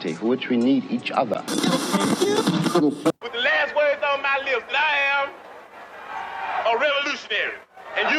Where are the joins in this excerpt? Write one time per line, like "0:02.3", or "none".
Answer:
none